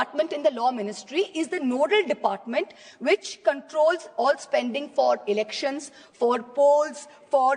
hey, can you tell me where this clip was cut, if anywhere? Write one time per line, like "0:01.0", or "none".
none